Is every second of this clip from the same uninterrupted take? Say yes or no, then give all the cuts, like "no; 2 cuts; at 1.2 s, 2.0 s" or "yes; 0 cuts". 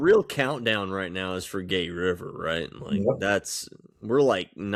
yes; 0 cuts